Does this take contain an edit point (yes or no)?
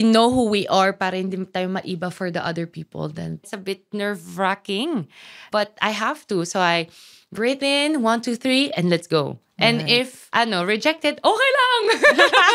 yes